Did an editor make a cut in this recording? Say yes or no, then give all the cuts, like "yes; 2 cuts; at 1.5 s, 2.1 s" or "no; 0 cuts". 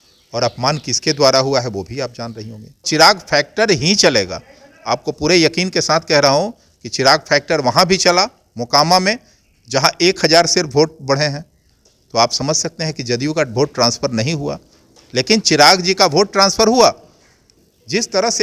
yes; 2 cuts; at 2.8 s, 17.5 s